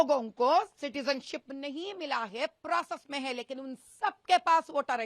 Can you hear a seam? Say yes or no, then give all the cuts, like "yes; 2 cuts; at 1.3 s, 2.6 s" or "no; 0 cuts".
no; 0 cuts